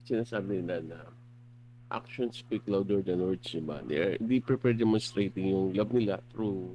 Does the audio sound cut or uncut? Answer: uncut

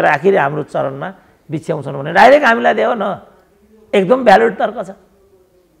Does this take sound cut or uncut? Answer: uncut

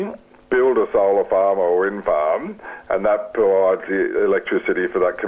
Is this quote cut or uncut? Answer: uncut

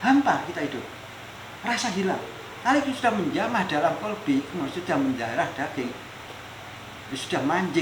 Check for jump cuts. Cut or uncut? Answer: uncut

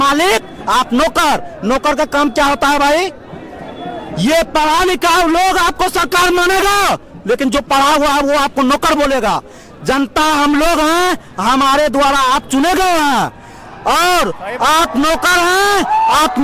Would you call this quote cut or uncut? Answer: uncut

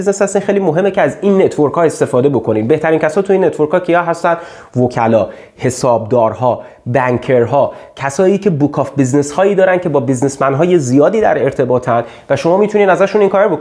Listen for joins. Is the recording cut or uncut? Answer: uncut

